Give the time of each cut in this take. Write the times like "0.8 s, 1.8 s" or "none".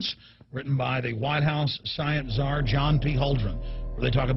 3.4 s